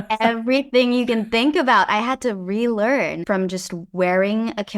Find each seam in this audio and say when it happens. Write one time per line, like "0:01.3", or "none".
0:03.2